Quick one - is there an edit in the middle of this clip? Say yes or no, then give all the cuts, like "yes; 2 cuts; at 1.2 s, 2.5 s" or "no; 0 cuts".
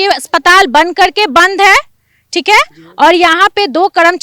no; 0 cuts